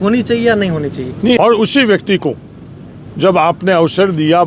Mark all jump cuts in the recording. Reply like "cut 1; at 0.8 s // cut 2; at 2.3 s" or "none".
cut 1; at 1.5 s